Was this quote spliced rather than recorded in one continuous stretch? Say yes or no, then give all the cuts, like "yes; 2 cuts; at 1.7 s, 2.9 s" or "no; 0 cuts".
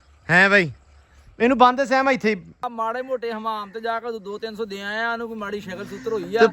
yes; 1 cut; at 2.7 s